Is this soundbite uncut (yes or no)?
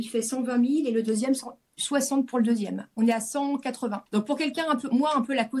no